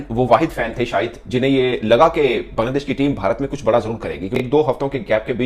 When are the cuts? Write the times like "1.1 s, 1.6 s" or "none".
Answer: 4.3 s